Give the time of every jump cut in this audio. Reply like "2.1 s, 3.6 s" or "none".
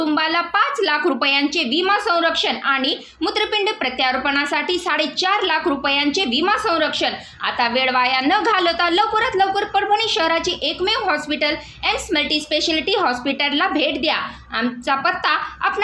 none